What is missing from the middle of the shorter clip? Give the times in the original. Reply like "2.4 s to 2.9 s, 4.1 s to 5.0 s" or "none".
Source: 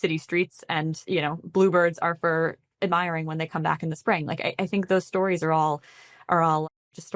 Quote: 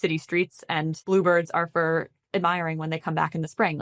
1.0 s to 1.5 s